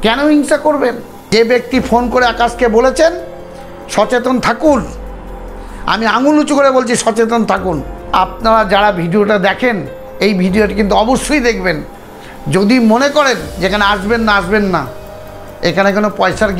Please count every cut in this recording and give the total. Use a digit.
2